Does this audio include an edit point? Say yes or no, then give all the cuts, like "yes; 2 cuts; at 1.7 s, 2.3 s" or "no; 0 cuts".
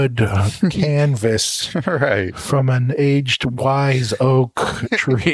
no; 0 cuts